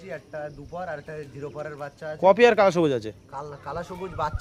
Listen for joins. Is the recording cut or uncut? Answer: uncut